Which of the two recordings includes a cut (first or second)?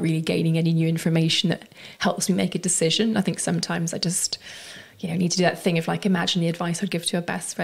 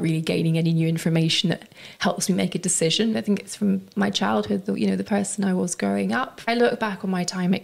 second